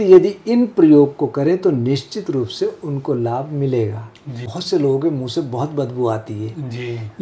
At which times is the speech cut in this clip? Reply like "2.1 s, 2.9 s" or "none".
4.5 s